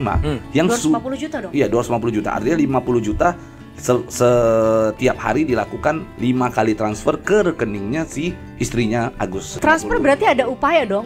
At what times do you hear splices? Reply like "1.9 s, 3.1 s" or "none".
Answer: 9.4 s